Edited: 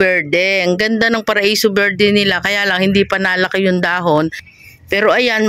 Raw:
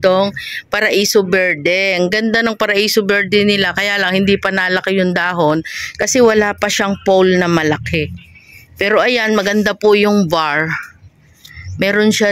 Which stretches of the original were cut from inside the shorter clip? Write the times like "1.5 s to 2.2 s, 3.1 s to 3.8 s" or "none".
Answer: 5.8 s to 8.4 s